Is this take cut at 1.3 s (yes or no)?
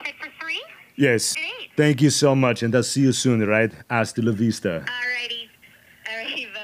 yes